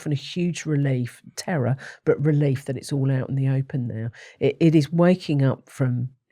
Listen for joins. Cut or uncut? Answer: uncut